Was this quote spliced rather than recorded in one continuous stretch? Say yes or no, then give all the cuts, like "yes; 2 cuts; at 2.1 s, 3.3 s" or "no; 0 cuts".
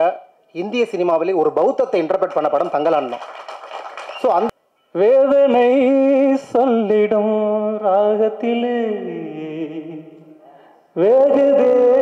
yes; 1 cut; at 4.5 s